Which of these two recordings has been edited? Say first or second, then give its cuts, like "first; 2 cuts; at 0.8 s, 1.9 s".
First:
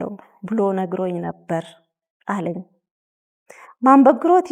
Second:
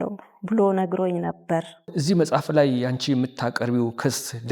second; 1 cut; at 1.9 s